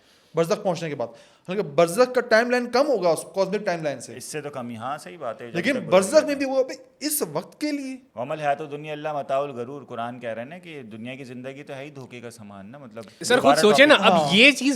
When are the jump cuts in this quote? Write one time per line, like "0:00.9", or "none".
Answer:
0:08.0
0:13.2